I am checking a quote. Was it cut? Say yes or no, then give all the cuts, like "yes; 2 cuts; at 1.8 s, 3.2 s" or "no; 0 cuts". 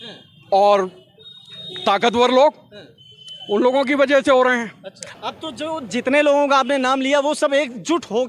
yes; 1 cut; at 5.1 s